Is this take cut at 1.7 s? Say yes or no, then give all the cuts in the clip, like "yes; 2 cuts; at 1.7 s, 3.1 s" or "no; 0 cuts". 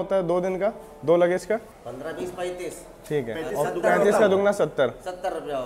yes; 1 cut; at 1.7 s